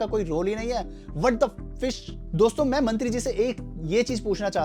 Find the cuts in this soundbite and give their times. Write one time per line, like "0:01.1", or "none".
none